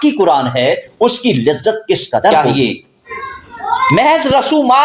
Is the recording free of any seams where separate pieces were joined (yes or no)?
no